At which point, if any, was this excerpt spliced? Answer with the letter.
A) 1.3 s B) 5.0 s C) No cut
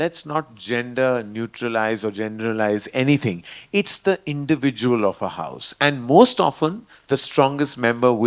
C